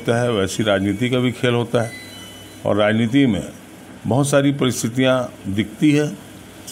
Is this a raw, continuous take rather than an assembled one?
yes; 0 cuts

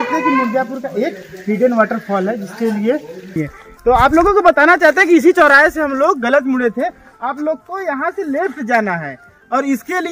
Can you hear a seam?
yes; 1 cut; at 3.3 s

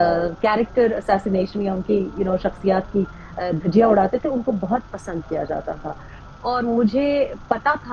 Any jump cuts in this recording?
no; 0 cuts

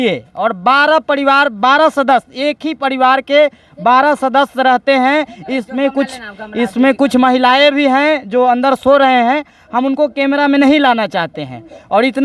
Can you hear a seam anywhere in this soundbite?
no; 0 cuts

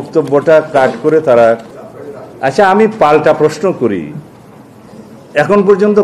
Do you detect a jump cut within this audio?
yes; 1 cut; at 1.6 s

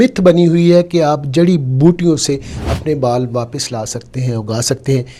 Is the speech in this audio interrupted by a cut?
no; 0 cuts

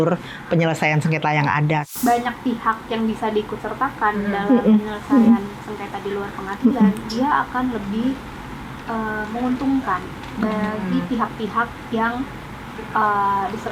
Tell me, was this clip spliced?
yes; 1 cut; at 1.8 s

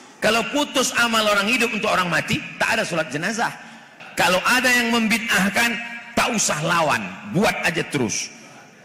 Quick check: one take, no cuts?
no; 1 cut; at 4.0 s

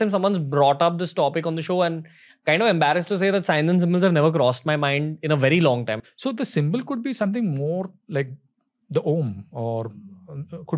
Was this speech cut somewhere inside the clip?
yes; 1 cut; at 6.0 s

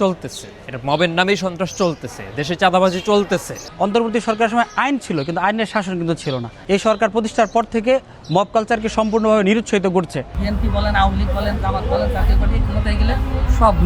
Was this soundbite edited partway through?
yes; 3 cuts; at 3.6 s, 6.5 s, 10.4 s

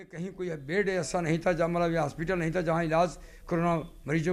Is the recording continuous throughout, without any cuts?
yes; 0 cuts

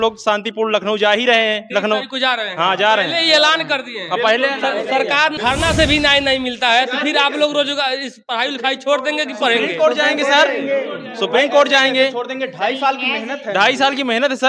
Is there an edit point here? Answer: yes; 1 cut; at 5.3 s

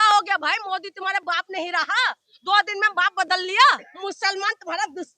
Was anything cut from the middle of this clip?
yes; 1 cut; at 3.9 s

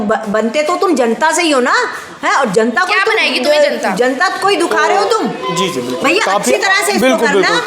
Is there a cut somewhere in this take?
no; 0 cuts

